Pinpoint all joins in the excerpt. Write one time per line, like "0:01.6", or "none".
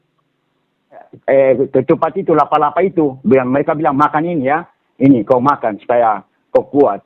0:01.1